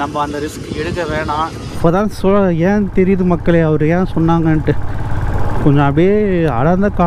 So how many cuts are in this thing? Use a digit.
1